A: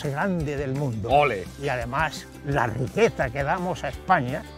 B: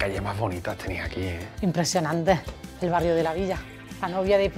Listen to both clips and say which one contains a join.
A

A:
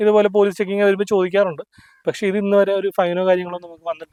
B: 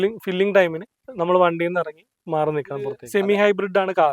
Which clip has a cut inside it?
B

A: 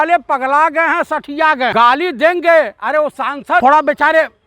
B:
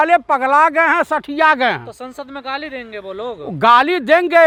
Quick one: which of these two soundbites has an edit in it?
A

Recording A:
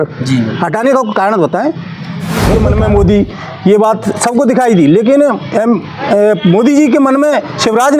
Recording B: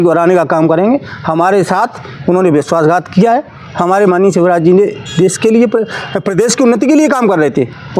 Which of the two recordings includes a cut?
A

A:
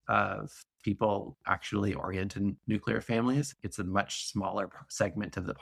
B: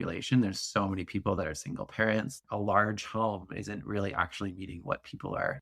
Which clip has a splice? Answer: B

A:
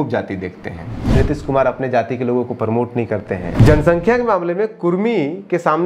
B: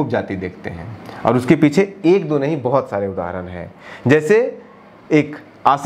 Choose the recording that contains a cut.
A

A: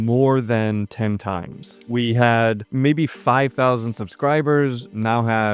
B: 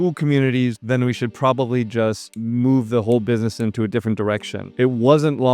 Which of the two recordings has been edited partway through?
B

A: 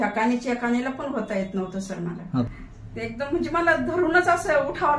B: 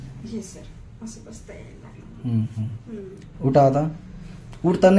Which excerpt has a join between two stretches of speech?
A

